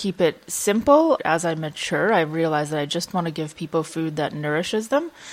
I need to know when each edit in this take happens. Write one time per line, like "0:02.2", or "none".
0:01.2